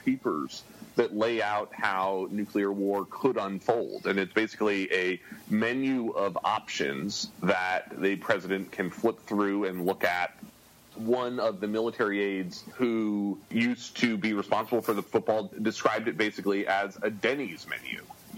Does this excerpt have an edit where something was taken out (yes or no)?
yes